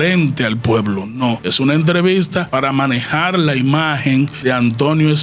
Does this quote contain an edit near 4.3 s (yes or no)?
yes